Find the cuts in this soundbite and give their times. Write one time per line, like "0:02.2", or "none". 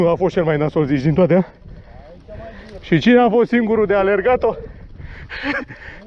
0:02.8